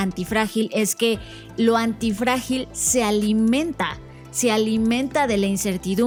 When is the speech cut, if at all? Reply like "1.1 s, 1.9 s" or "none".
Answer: none